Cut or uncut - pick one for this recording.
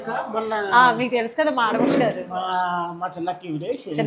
uncut